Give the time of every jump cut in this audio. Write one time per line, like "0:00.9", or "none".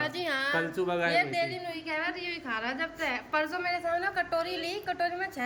none